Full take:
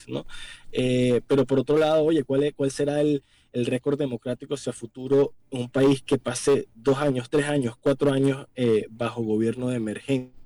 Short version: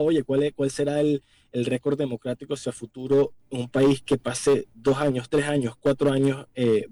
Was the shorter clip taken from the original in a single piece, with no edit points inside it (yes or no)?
yes